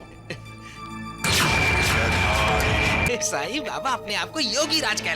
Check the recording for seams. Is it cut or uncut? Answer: cut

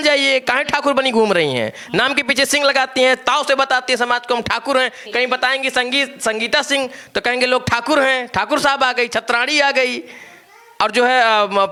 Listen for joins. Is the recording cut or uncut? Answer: uncut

